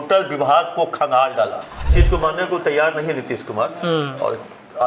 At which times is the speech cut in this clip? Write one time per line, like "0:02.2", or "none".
0:01.8